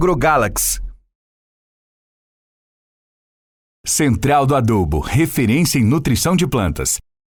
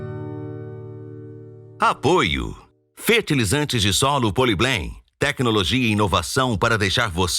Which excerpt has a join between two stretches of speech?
second; 1 cut; at 1.6 s

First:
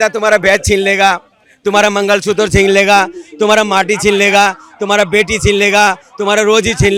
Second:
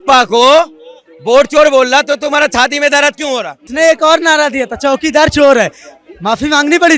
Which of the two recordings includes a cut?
second; 1 cut; at 3.6 s

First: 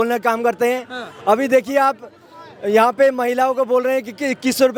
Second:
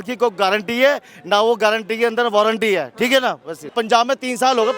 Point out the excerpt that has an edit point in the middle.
second; 1 cut; at 3.7 s

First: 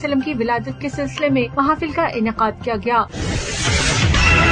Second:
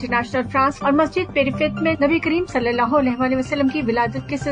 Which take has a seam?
first; 1 cut; at 3.1 s

